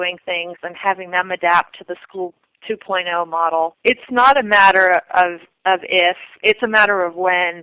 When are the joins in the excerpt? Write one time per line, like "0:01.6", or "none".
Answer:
0:03.8